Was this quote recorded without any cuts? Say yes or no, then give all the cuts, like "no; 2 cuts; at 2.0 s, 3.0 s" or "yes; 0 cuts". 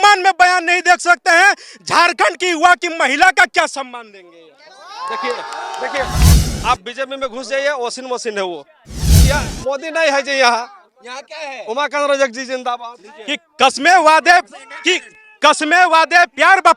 no; 3 cuts; at 6.3 s, 9.1 s, 12.8 s